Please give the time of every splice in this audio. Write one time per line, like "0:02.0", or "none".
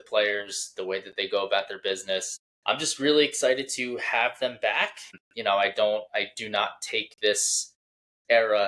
0:02.3
0:05.1